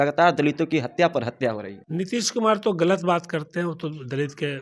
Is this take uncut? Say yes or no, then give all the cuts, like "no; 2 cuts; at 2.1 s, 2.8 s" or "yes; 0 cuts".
no; 1 cut; at 1.7 s